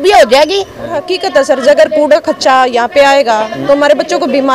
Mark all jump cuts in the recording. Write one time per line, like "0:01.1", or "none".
0:01.1